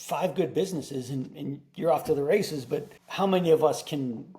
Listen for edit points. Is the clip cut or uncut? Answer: cut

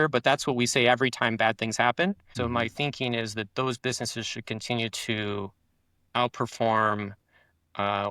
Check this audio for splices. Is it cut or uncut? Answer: cut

